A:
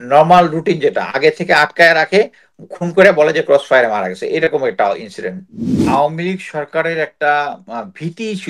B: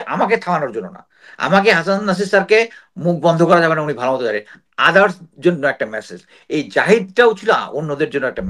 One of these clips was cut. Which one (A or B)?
A